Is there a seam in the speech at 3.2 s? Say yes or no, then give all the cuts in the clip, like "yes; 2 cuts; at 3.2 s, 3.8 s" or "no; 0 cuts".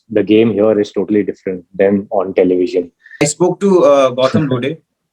yes; 1 cut; at 3.2 s